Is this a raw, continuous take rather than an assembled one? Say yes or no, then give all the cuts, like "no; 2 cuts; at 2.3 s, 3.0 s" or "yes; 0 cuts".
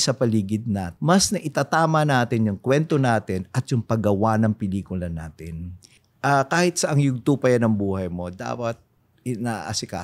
no; 1 cut; at 5.8 s